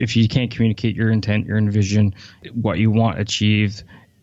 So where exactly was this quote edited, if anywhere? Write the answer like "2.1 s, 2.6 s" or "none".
2.5 s